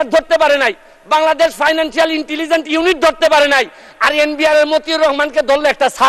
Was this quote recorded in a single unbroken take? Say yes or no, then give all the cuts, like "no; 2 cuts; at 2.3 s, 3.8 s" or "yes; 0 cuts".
yes; 0 cuts